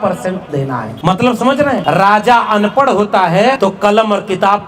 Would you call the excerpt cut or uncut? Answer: cut